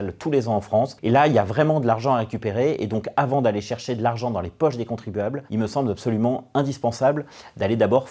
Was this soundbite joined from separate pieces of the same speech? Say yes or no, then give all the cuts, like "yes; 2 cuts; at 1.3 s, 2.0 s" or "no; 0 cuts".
no; 0 cuts